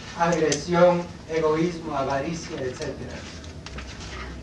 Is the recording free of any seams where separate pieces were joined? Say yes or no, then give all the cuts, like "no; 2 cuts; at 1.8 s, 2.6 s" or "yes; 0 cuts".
yes; 0 cuts